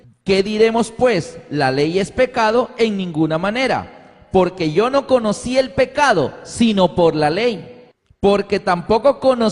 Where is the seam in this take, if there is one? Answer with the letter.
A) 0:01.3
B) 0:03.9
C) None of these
A